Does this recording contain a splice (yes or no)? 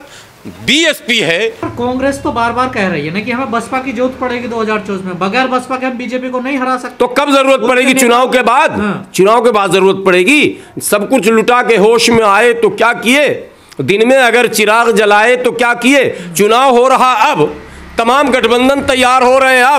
yes